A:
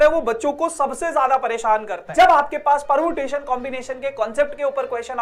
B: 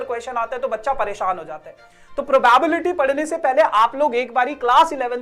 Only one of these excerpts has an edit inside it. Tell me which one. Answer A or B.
A